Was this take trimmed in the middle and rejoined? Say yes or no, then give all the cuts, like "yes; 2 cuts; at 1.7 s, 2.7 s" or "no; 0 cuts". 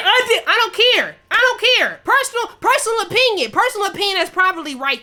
no; 0 cuts